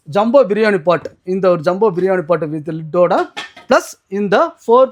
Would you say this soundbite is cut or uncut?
uncut